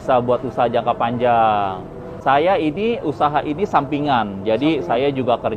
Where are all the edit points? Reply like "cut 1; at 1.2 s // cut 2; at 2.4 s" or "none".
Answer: cut 1; at 2.1 s